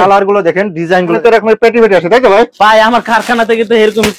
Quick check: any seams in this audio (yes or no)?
yes